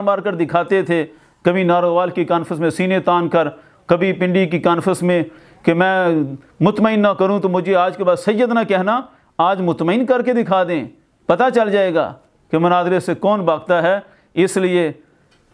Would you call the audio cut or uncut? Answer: uncut